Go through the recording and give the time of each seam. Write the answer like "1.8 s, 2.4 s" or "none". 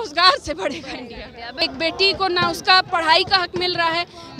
1.6 s